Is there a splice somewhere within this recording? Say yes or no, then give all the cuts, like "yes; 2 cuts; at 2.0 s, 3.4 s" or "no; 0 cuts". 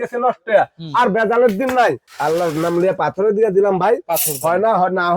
yes; 1 cut; at 2.1 s